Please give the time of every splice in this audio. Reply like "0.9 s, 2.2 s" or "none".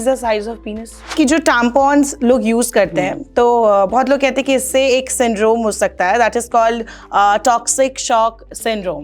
1.1 s